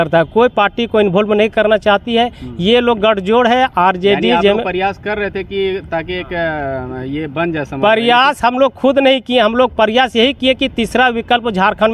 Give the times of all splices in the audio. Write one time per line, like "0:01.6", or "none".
none